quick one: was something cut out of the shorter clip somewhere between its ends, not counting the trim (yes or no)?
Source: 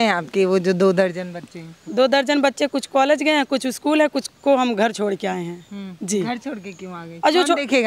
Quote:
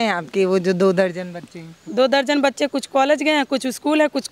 no